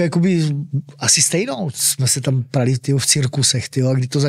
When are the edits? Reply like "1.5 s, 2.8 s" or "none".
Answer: 1.8 s